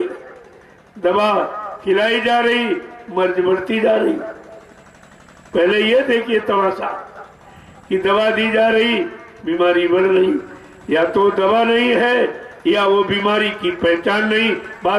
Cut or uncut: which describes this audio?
uncut